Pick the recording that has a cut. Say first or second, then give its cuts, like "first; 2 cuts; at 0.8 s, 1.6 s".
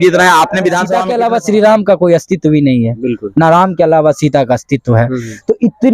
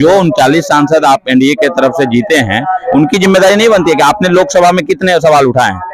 first; 1 cut; at 1.0 s